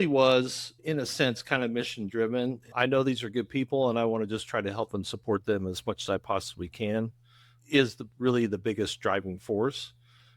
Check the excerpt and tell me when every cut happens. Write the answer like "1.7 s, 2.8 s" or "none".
0.8 s, 2.6 s